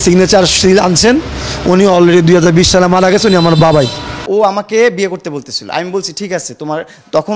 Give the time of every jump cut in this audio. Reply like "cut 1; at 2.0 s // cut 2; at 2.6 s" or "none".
cut 1; at 4.2 s